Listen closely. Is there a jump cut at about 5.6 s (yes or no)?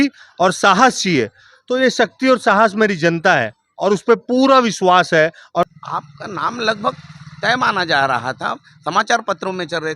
yes